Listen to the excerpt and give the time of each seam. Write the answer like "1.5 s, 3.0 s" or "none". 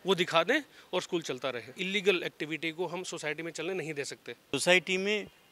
1.8 s, 4.5 s

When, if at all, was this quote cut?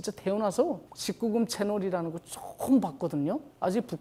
none

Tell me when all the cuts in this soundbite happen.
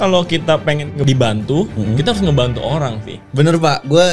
1.0 s

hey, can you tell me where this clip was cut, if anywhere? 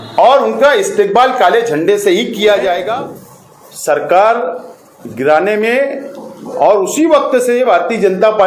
2.9 s

